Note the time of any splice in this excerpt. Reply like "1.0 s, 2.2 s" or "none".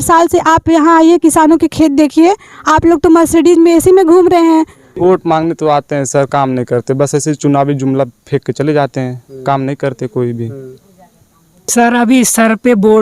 4.9 s, 11.5 s